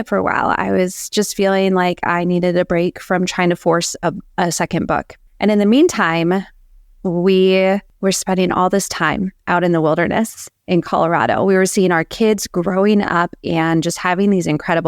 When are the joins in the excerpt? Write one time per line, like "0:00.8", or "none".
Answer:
0:05.2
0:07.9